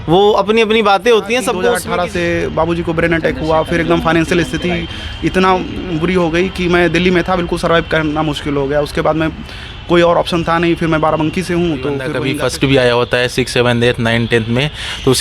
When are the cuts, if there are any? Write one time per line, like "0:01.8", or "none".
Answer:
0:01.8
0:12.1